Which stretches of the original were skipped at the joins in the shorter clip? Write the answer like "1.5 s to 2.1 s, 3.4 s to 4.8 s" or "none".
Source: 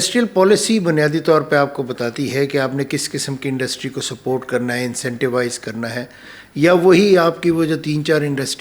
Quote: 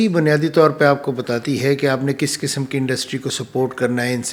none